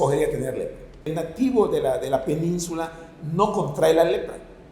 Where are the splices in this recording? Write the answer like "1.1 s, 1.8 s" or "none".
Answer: 1.1 s